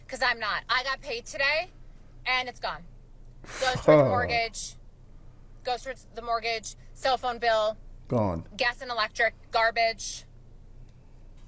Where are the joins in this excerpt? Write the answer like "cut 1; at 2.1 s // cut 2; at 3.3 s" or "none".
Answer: none